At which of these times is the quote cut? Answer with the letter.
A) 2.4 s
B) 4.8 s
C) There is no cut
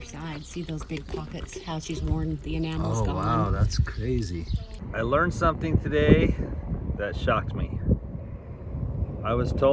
B